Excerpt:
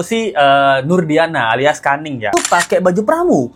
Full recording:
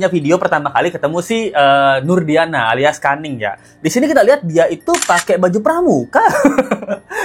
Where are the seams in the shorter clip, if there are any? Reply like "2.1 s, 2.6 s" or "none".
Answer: 2.3 s